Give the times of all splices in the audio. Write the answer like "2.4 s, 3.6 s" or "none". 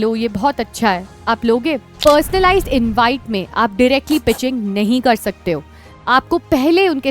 1.9 s